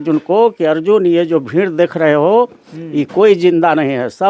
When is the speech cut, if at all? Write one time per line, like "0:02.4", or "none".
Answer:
none